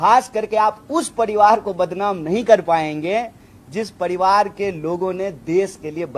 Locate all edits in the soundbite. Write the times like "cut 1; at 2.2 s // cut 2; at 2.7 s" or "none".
none